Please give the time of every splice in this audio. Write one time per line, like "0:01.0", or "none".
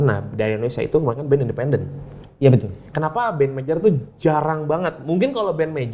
none